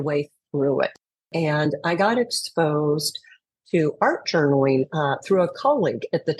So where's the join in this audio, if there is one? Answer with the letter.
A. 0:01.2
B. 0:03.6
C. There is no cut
A